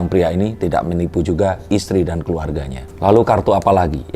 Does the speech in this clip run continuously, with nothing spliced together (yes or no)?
yes